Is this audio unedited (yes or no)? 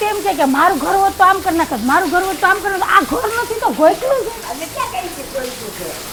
yes